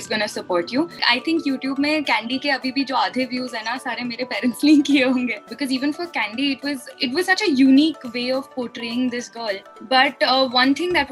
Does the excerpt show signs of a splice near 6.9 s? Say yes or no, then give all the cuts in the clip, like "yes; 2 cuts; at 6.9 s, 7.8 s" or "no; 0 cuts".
no; 3 cuts; at 1.0 s, 5.4 s, 9.7 s